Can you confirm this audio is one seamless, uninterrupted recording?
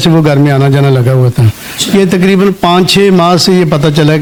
yes; 0 cuts

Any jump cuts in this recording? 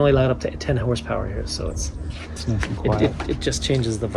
no; 0 cuts

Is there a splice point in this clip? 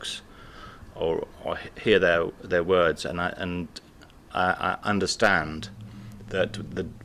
no; 0 cuts

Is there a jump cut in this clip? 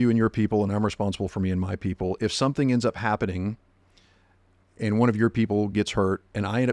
no; 0 cuts

